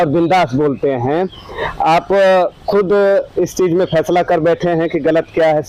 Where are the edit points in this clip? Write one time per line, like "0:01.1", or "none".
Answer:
none